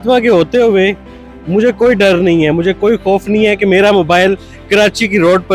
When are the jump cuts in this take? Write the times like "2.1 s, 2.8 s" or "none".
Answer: none